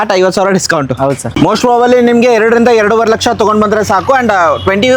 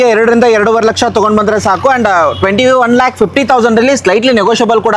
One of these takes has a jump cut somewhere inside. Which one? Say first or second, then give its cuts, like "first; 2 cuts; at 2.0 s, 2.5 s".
first; 1 cut; at 1.3 s